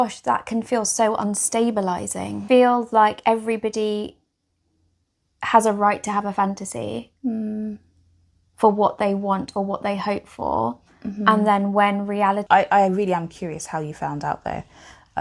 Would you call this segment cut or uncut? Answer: cut